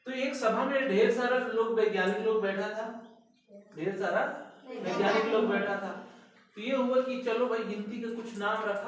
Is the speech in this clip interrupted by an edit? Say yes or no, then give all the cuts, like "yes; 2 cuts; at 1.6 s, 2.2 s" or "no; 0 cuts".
no; 0 cuts